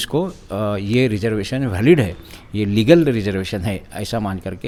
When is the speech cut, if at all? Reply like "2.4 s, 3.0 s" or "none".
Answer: none